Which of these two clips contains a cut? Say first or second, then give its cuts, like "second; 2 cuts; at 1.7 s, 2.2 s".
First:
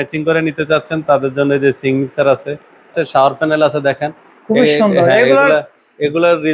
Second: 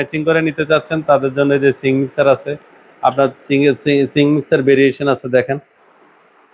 first; 1 cut; at 2.9 s